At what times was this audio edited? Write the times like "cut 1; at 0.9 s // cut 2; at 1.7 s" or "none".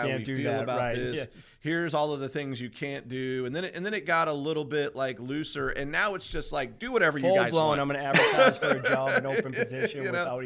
none

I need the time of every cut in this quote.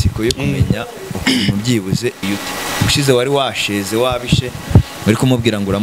cut 1; at 2.2 s

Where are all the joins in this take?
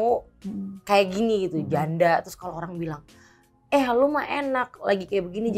none

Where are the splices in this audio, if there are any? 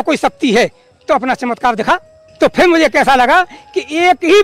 cut 1; at 2.2 s

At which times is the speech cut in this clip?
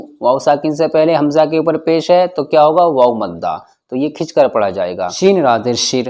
cut 1; at 5.1 s

